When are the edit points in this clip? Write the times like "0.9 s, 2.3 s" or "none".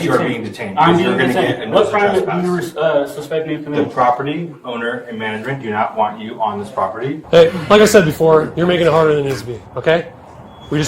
7.2 s